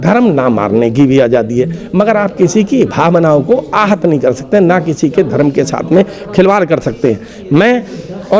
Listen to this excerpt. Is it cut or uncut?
uncut